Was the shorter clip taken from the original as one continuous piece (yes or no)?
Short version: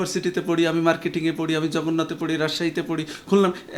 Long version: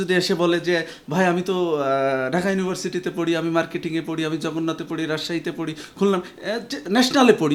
yes